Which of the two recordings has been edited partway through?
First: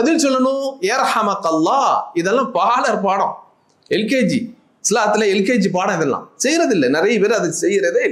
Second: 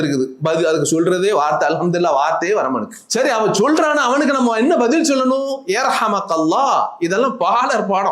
second; 1 cut; at 3.0 s

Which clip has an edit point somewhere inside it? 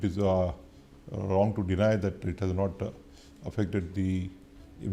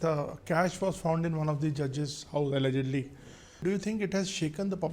second; 1 cut; at 3.6 s

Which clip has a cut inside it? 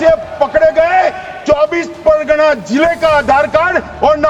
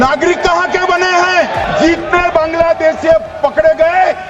second; 1 cut; at 1.6 s

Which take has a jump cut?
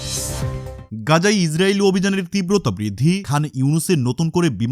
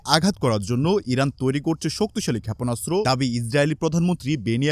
first; 1 cut; at 1.0 s

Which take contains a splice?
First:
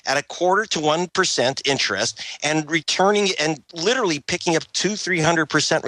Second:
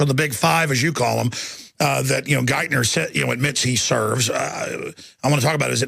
second; 1 cut; at 4.8 s

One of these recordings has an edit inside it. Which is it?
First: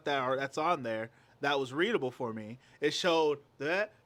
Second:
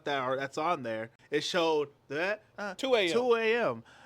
second; 2 cuts; at 1.1 s, 2.5 s

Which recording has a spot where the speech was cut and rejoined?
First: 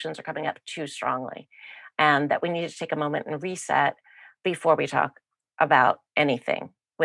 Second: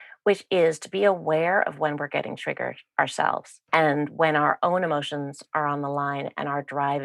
second; 1 cut; at 3.5 s

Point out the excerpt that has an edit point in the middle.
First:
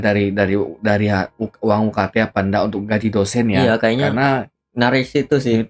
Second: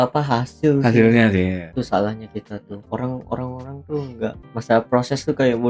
second; 3 cuts; at 1.6 s, 2.7 s, 4.4 s

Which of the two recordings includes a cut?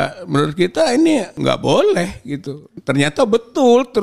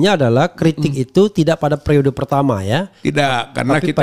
first; 2 cuts; at 1.3 s, 2.7 s

